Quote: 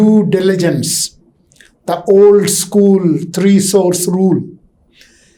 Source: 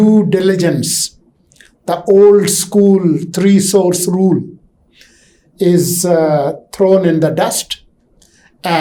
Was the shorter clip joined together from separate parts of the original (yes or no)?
no